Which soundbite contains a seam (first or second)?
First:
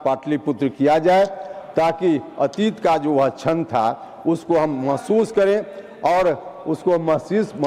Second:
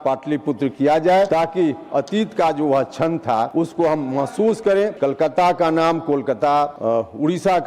second